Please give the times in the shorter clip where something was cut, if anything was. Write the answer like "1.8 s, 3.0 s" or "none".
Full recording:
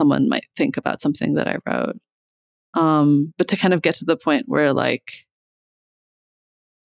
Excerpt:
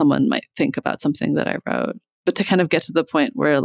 2.2 s